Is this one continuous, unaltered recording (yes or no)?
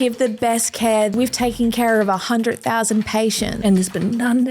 no